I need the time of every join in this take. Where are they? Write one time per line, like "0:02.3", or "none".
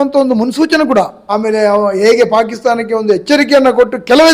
0:01.2